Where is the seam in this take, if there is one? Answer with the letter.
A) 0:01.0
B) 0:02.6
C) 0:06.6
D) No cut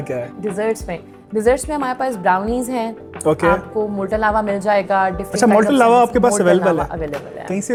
D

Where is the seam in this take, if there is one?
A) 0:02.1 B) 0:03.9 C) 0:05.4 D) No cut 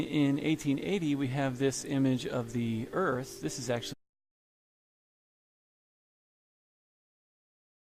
D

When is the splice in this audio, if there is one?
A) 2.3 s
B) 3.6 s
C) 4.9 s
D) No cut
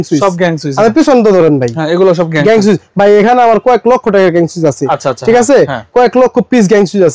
D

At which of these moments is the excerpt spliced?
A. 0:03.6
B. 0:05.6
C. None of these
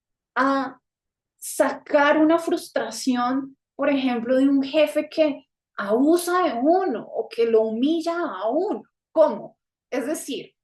C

